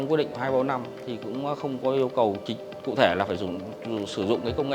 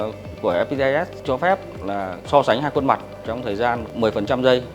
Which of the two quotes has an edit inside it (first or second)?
second